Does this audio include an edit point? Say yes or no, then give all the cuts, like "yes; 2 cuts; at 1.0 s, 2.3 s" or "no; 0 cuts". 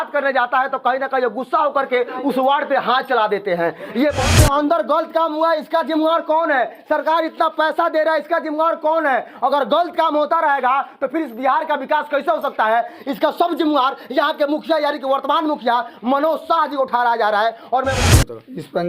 yes; 2 cuts; at 4.3 s, 18.0 s